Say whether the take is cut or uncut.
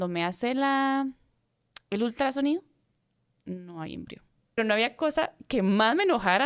cut